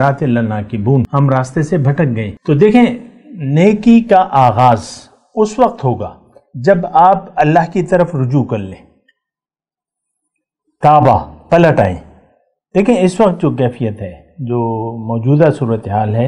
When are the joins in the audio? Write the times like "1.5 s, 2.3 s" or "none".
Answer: 1.1 s, 2.3 s

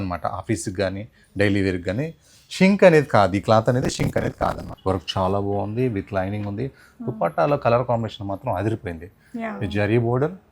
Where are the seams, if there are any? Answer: 4.7 s

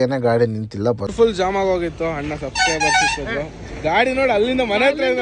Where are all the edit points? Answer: 1.1 s

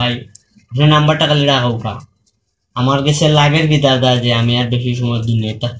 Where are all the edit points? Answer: none

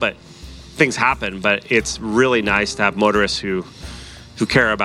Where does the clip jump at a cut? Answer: none

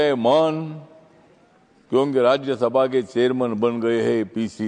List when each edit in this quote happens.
none

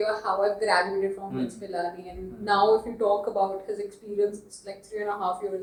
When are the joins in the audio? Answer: none

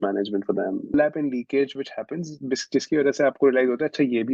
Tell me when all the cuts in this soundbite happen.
0.9 s

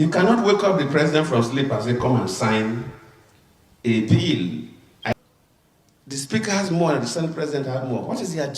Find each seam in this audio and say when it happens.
5.1 s

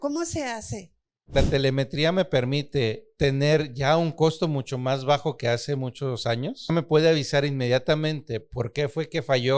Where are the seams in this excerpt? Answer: 1.3 s, 3.1 s, 6.7 s

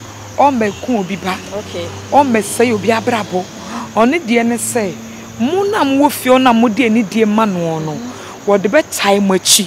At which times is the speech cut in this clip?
none

